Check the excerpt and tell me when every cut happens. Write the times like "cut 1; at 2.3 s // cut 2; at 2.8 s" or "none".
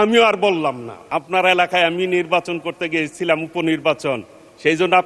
cut 1; at 0.9 s